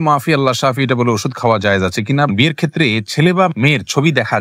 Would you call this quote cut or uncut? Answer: cut